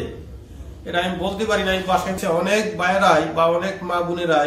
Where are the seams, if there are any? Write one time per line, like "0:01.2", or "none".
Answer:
0:02.2

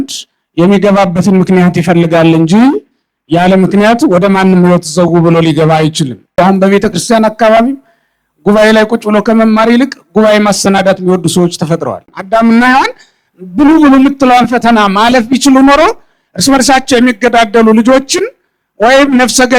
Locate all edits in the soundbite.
0:06.3
0:12.1

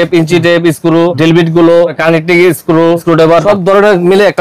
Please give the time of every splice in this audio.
0:01.1
0:02.0
0:03.4

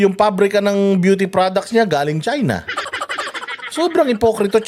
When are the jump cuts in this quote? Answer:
none

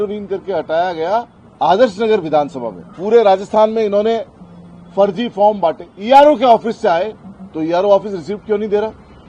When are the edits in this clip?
0:01.4
0:05.9

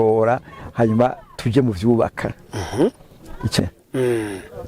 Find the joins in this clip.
0:03.6

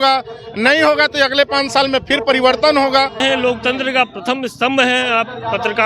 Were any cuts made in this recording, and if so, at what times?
0:03.2

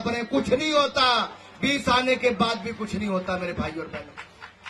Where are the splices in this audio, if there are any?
none

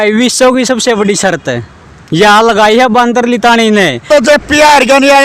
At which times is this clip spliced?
0:04.1

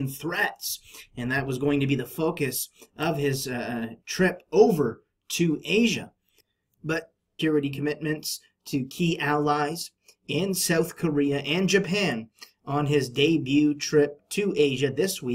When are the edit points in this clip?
none

